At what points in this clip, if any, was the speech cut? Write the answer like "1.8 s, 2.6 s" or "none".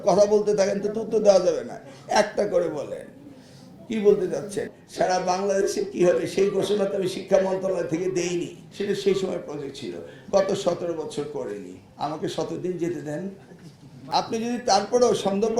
4.6 s, 8.6 s, 14.0 s